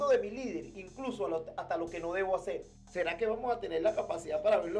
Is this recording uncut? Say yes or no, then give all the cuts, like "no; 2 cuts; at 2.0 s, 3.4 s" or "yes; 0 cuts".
no; 1 cut; at 2.8 s